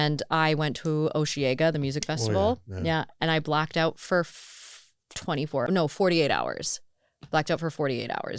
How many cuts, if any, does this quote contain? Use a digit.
1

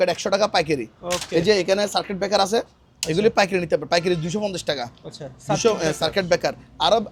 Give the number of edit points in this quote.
0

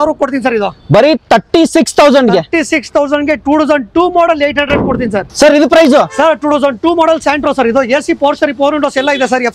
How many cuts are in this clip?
0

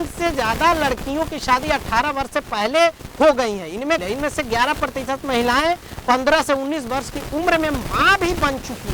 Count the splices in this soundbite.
1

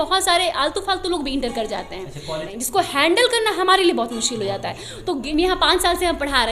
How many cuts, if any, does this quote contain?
2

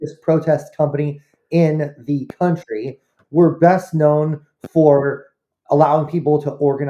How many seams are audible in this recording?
1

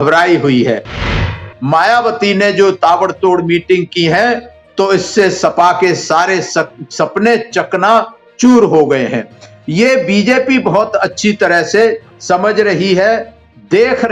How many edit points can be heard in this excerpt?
1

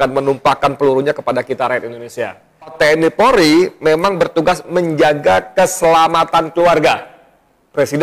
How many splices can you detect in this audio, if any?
1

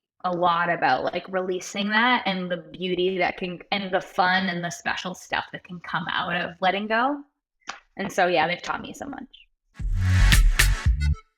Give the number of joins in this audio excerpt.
1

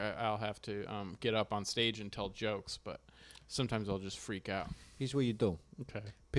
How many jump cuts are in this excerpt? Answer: 1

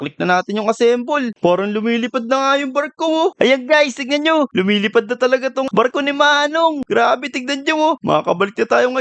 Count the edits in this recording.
2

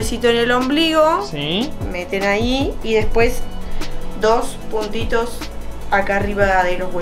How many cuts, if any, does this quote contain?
0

